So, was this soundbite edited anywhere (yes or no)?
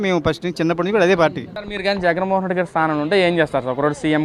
yes